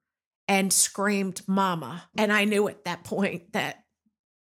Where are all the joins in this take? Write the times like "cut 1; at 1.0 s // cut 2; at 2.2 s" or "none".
cut 1; at 2.1 s